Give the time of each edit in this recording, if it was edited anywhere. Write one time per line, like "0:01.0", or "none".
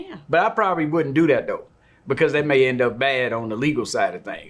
none